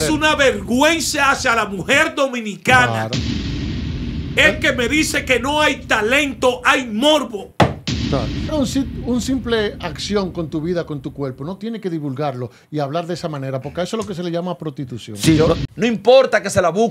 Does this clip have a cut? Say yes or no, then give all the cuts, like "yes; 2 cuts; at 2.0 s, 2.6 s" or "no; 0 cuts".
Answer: yes; 2 cuts; at 8.5 s, 15.6 s